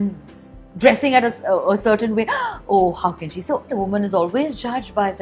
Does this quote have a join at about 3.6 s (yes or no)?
yes